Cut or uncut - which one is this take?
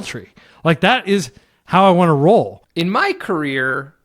cut